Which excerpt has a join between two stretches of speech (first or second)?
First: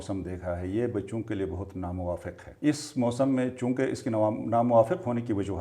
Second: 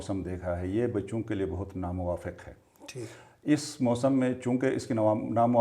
first